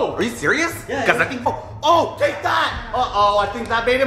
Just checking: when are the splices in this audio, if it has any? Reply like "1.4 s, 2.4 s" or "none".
1.5 s